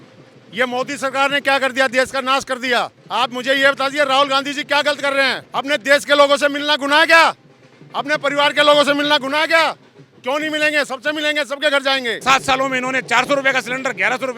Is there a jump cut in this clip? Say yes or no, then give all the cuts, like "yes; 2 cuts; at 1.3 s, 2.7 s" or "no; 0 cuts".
yes; 3 cuts; at 3.0 s, 5.4 s, 12.2 s